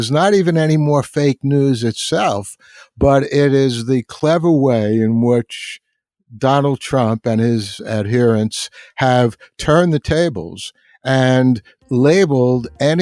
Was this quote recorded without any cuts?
yes; 0 cuts

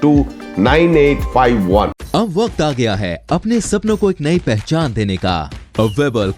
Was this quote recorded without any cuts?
yes; 0 cuts

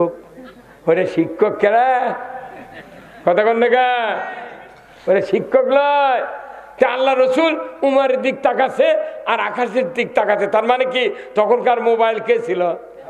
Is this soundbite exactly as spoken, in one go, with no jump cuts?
yes; 0 cuts

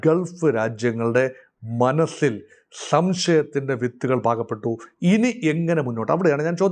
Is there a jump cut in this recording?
no; 0 cuts

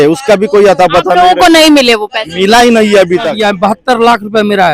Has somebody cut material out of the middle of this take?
yes; 1 cut; at 3.4 s

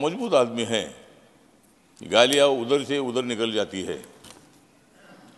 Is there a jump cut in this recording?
no; 0 cuts

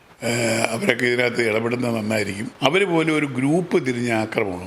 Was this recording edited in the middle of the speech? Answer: yes; 1 cut; at 2.4 s

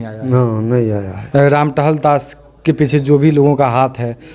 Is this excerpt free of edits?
no; 1 cut; at 1.1 s

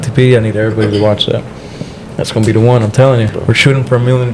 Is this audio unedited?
no; 1 cut; at 3.3 s

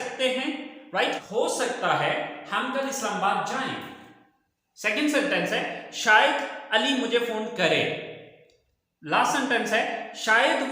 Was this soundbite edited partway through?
yes; 1 cut; at 1.2 s

